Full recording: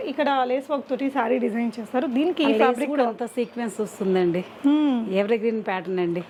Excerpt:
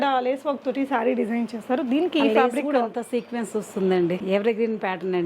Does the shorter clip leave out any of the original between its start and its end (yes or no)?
yes